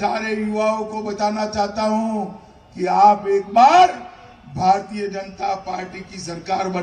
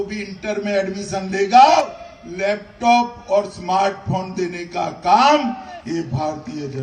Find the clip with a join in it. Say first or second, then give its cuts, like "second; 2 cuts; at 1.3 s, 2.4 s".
second; 1 cut; at 1.8 s